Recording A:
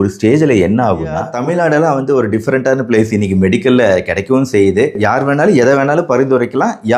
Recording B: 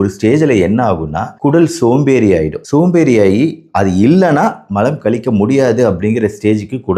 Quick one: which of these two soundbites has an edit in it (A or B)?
A